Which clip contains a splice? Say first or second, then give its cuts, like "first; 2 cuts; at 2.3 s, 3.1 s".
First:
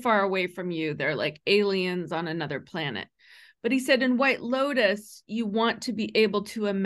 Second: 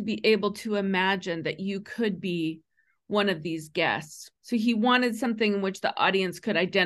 second; 1 cut; at 4.2 s